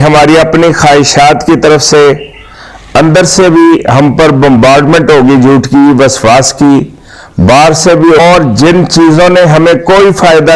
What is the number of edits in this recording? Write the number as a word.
one